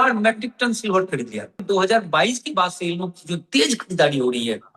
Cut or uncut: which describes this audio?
cut